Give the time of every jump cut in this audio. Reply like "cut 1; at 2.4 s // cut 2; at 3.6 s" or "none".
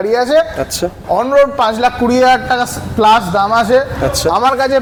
none